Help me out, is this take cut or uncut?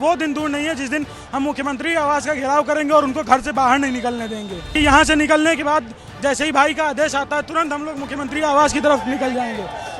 cut